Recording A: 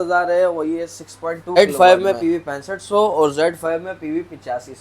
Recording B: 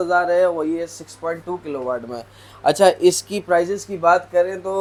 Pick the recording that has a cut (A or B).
A